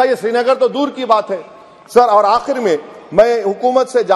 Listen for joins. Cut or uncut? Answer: uncut